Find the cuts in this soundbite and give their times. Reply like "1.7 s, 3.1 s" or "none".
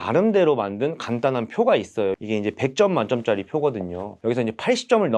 2.2 s